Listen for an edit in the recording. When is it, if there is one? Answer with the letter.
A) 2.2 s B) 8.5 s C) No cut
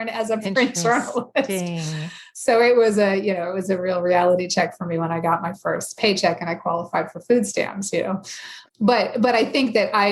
B